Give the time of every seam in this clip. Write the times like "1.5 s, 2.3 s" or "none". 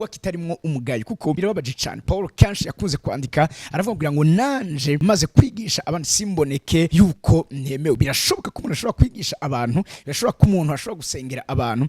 1.4 s, 5.0 s, 6.9 s